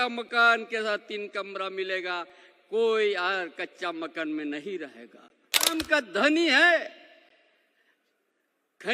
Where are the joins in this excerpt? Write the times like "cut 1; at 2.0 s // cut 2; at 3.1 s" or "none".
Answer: cut 1; at 5.7 s